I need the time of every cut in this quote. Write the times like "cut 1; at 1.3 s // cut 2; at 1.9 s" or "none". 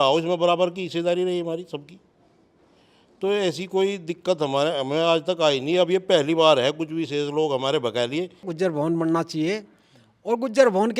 cut 1; at 8.5 s